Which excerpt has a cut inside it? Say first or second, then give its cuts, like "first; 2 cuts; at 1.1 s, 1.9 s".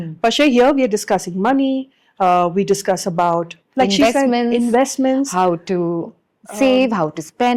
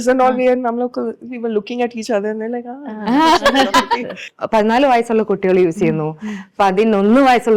second; 1 cut; at 4.2 s